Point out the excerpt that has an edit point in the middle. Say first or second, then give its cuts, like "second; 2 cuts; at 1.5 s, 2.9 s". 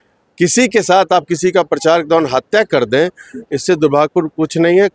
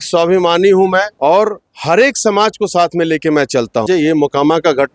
second; 2 cuts; at 1.1 s, 3.8 s